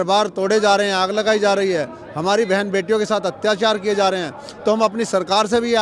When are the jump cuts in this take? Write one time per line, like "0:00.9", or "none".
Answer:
none